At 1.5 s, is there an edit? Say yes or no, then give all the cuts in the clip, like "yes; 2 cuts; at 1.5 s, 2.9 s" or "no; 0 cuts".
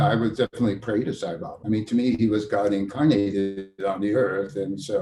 yes; 1 cut; at 1.5 s